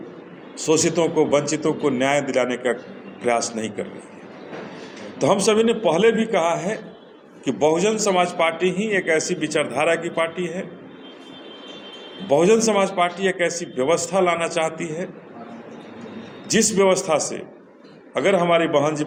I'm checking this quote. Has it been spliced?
no; 0 cuts

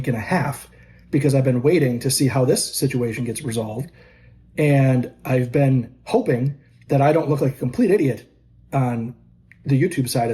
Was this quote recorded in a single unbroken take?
yes; 0 cuts

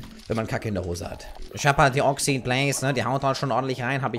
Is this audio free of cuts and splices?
no; 1 cut; at 1.3 s

